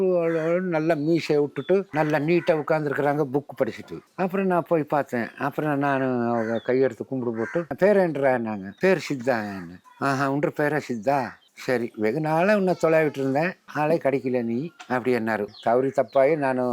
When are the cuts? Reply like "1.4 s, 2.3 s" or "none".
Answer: 1.9 s, 4.0 s, 7.7 s, 15.5 s

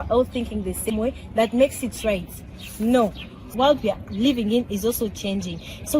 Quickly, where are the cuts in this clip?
3.5 s

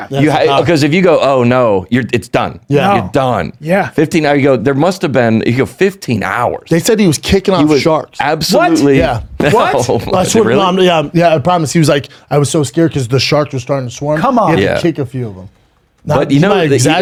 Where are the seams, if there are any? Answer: none

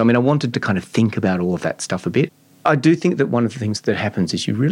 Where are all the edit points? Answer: 2.3 s, 3.8 s

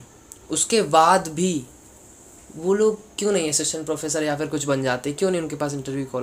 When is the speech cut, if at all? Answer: none

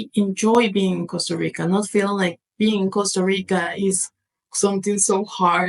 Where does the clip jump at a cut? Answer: none

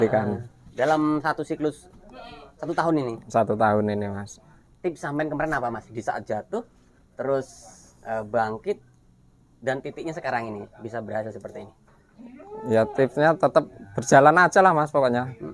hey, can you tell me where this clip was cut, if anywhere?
none

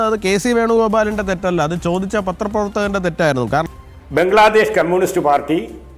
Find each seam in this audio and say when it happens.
3.7 s

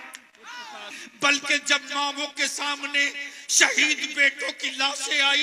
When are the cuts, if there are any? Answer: 1.0 s

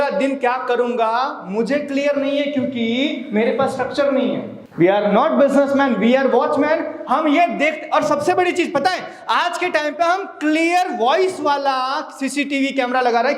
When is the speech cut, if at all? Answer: 4.6 s

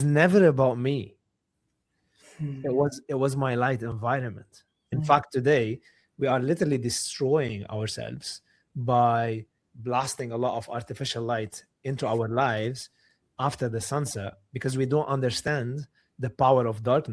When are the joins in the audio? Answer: 4.9 s

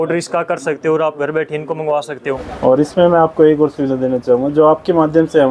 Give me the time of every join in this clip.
2.5 s

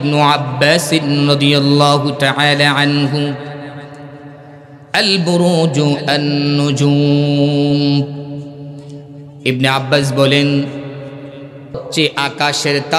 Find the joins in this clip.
9.2 s, 11.9 s

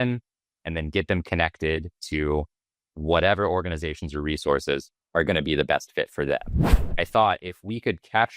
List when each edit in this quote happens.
5.0 s, 6.5 s

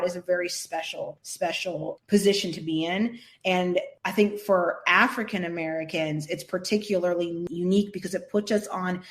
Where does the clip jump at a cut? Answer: 1.2 s, 4.0 s, 7.4 s

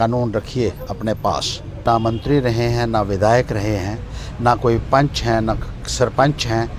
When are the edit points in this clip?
1.8 s

